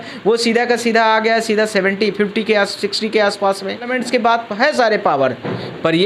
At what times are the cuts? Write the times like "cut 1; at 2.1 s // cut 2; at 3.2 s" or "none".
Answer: cut 1; at 4.0 s